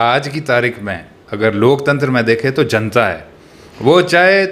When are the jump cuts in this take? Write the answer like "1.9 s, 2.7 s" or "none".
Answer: none